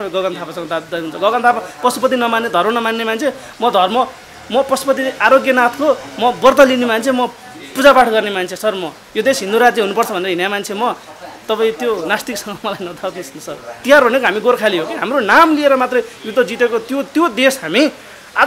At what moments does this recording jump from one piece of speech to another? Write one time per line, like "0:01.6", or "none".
0:13.8